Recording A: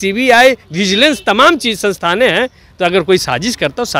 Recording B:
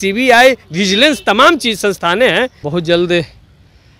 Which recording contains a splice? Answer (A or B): B